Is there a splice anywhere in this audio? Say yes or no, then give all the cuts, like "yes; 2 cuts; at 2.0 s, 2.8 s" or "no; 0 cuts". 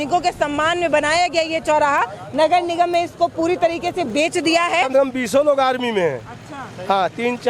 yes; 1 cut; at 4.8 s